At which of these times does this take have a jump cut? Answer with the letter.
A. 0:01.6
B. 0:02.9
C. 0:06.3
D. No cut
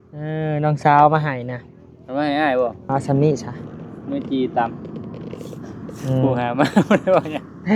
B